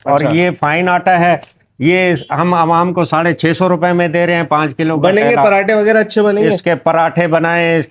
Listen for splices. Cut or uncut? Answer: uncut